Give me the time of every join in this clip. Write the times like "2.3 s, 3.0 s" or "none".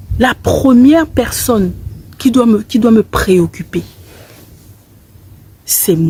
none